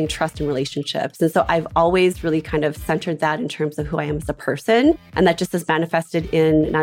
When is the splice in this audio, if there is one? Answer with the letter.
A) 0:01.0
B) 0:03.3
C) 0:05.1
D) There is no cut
C